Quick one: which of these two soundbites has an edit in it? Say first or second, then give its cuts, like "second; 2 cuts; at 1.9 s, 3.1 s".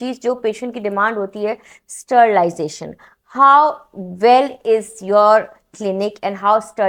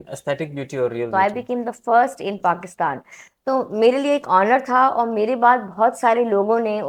second; 1 cut; at 1.1 s